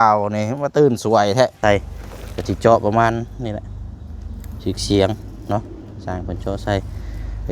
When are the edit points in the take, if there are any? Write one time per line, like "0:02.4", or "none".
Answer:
0:01.6